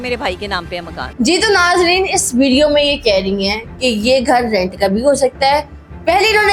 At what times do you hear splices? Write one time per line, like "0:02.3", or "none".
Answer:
none